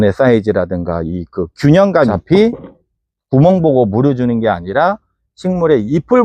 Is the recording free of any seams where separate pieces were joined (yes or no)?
no